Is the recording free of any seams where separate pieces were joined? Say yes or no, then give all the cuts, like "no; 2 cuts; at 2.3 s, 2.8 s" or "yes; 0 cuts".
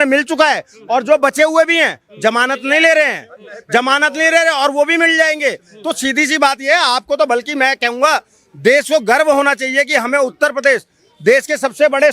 yes; 0 cuts